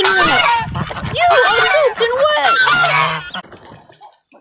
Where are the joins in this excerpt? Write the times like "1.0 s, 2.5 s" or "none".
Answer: 3.5 s